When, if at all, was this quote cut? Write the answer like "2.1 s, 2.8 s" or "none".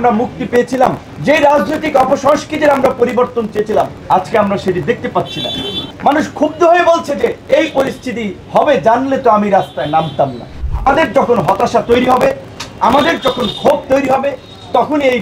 1.1 s, 4.0 s, 5.8 s, 7.4 s, 8.4 s, 10.6 s